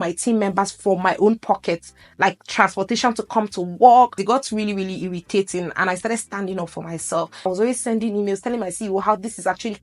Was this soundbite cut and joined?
yes; 2 cuts; at 4.2 s, 7.5 s

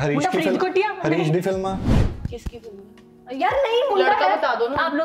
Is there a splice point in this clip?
yes; 1 cut; at 1.9 s

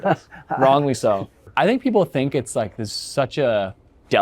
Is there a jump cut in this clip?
yes; 1 cut; at 1.4 s

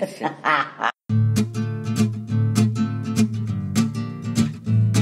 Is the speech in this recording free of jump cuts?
no; 1 cut; at 1.0 s

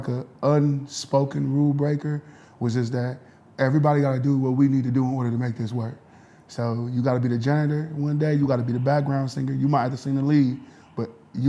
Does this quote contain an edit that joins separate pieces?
no; 0 cuts

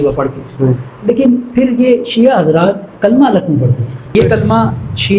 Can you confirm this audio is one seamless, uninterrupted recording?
no; 1 cut; at 4.1 s

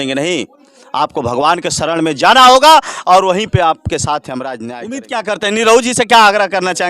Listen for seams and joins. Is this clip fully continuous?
no; 1 cut; at 4.7 s

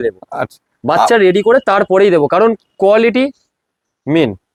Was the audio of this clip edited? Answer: no; 0 cuts

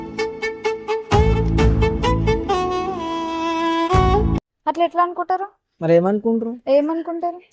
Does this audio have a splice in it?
no; 0 cuts

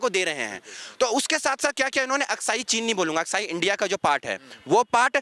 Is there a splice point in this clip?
no; 0 cuts

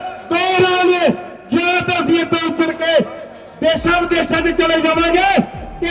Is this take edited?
no; 0 cuts

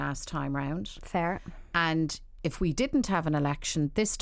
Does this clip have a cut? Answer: no; 0 cuts

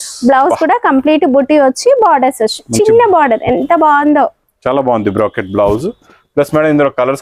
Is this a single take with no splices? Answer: yes; 0 cuts

